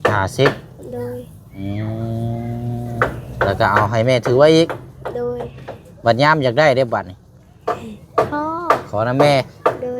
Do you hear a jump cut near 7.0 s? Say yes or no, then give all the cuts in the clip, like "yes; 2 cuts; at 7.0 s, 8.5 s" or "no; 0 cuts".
no; 1 cut; at 3.0 s